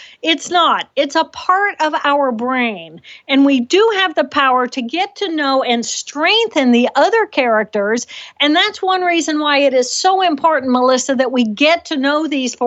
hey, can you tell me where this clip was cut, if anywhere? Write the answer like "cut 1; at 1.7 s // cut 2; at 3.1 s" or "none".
none